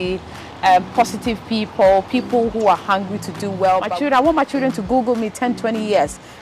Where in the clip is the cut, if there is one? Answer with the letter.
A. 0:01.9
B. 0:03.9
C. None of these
B